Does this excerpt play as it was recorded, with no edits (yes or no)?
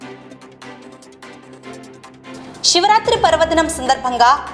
no